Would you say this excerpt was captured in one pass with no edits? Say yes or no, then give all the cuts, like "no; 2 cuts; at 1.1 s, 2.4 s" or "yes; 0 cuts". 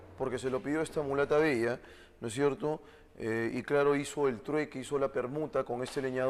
yes; 0 cuts